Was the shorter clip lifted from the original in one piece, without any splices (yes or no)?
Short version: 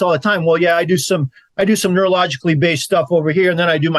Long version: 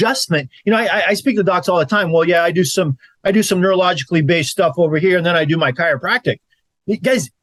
yes